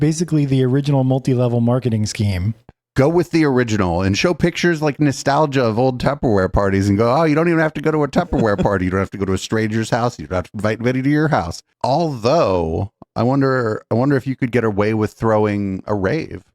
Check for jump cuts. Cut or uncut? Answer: cut